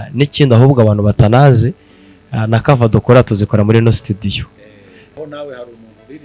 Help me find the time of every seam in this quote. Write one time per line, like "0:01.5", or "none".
0:05.2